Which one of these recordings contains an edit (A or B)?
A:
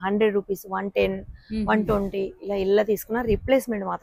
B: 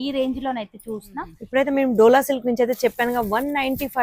B